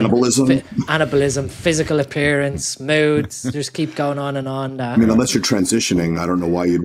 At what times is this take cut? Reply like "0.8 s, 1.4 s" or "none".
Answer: none

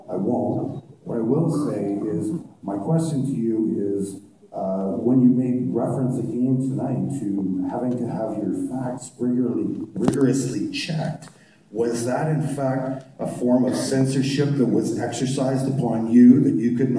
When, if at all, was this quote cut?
none

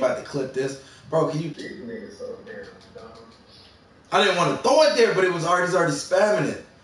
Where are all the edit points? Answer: 1.5 s

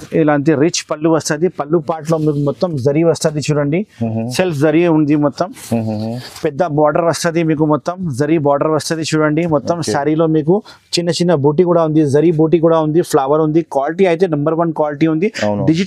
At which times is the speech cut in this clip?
none

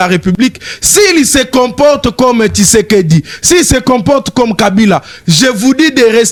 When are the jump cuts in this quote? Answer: none

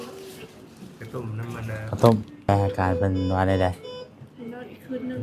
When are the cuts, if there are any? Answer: 2.5 s

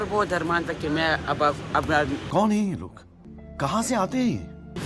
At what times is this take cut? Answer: none

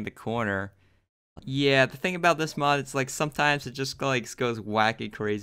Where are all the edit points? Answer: 1.3 s

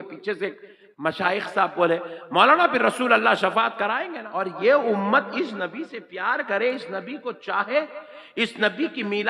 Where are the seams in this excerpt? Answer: 4.1 s

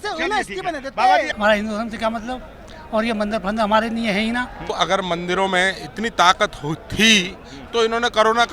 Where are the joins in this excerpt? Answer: 1.3 s, 4.7 s

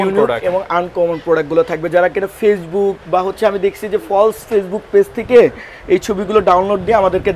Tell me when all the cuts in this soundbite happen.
none

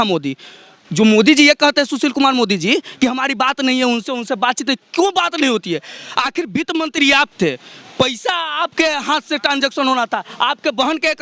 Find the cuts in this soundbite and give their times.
none

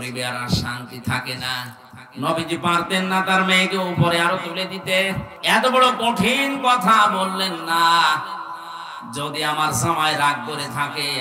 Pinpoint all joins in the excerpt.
1.8 s, 5.3 s

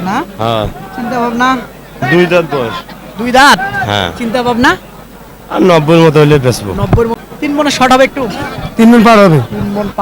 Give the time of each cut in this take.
7.2 s

